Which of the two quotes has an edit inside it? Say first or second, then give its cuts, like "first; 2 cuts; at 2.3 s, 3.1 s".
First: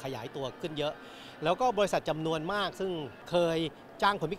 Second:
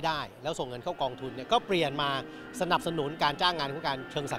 first; 1 cut; at 3.1 s